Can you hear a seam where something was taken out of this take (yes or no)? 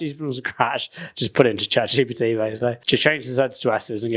yes